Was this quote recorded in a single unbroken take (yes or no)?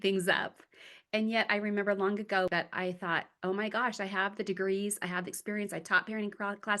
no